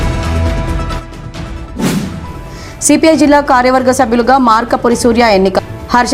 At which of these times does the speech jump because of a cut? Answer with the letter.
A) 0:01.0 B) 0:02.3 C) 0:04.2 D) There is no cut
A